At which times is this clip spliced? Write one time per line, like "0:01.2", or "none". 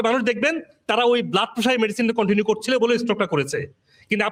none